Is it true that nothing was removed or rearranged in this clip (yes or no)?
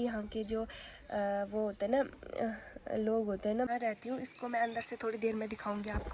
no